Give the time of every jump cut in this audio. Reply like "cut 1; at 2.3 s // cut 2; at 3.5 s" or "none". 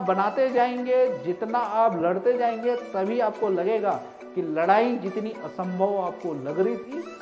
none